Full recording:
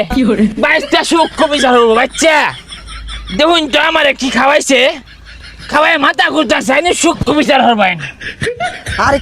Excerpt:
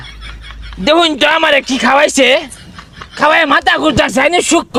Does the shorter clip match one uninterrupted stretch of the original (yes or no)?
yes